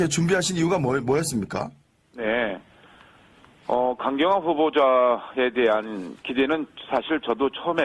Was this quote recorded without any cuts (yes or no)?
no